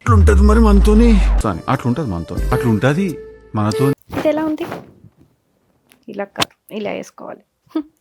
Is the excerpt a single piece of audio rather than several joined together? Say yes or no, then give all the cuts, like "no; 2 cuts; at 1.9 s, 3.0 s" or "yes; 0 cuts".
no; 1 cut; at 4.0 s